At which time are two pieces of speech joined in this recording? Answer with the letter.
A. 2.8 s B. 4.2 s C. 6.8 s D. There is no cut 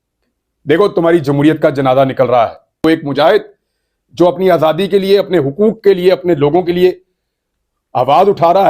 A